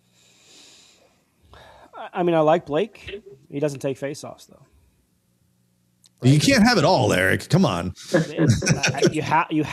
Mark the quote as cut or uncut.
uncut